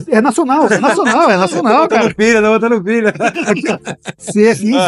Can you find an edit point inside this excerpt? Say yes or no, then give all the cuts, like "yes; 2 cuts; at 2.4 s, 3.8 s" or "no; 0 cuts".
no; 0 cuts